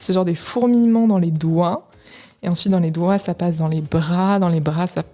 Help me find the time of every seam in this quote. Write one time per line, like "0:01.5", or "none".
none